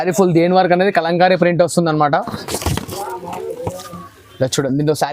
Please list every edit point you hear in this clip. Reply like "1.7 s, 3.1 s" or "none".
2.3 s